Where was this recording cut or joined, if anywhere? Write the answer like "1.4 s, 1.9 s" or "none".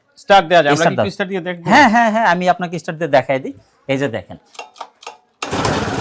none

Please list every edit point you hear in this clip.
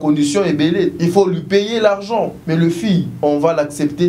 1.0 s, 2.4 s, 3.1 s

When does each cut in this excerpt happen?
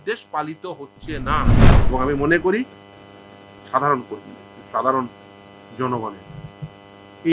1.7 s

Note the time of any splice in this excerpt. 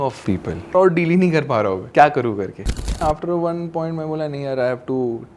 0.7 s, 1.8 s, 3.0 s

